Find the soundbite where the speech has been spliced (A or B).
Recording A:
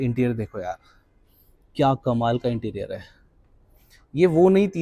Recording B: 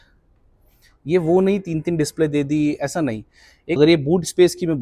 B